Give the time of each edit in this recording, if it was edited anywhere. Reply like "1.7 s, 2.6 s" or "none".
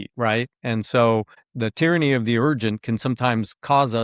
1.4 s